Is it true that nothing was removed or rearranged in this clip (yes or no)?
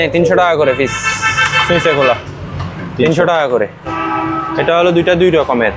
no